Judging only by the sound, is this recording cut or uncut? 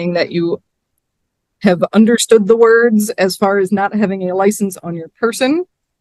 uncut